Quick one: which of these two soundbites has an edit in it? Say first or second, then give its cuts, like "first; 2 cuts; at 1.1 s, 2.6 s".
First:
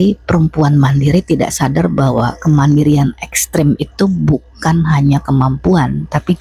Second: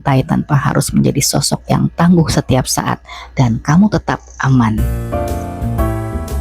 second; 1 cut; at 5.0 s